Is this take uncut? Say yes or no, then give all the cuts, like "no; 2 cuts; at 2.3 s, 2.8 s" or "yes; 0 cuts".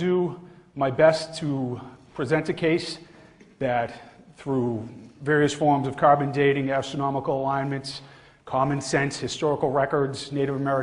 no; 1 cut; at 9.0 s